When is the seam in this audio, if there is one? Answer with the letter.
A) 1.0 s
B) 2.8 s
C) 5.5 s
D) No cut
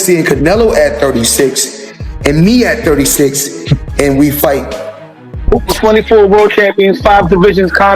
C